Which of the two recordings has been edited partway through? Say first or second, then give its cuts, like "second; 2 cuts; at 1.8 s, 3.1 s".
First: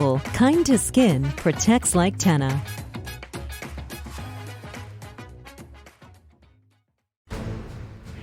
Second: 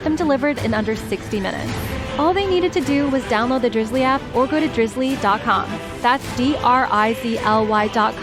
first; 1 cut; at 7.1 s